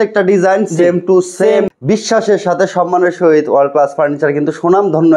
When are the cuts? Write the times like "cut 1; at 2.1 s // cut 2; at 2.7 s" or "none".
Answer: cut 1; at 1.7 s

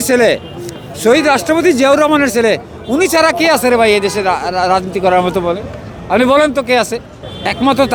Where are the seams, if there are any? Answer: none

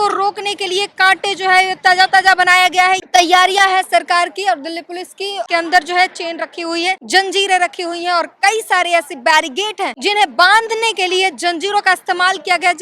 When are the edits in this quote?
cut 1; at 3.0 s // cut 2; at 5.4 s // cut 3; at 7.0 s // cut 4; at 10.0 s

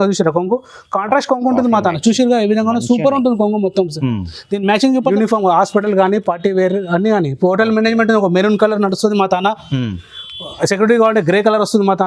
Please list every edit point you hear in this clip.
cut 1; at 5.1 s

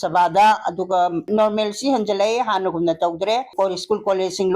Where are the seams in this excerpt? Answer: cut 1; at 1.3 s // cut 2; at 3.5 s

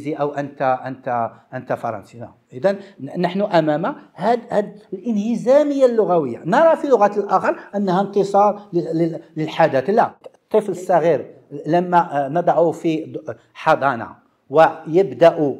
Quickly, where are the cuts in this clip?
cut 1; at 10.2 s

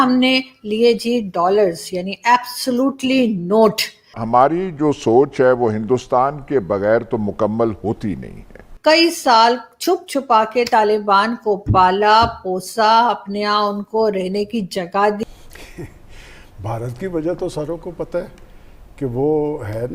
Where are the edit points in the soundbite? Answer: cut 1; at 4.2 s // cut 2; at 8.6 s // cut 3; at 15.2 s

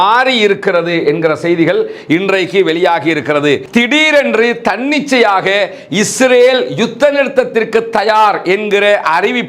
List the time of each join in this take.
cut 1; at 3.6 s

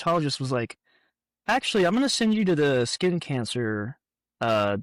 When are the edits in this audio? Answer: none

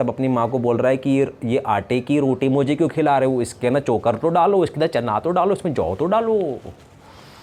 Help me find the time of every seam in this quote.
none

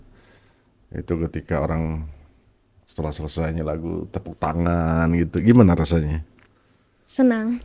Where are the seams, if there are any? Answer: none

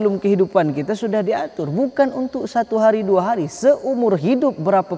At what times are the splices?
none

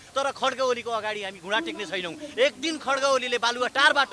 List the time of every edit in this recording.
none

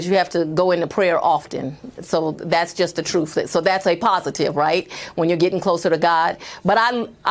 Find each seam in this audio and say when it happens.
none

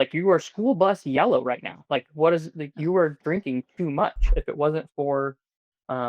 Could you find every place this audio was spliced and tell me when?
cut 1; at 4.3 s

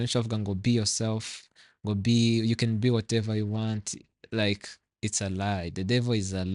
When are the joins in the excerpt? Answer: none

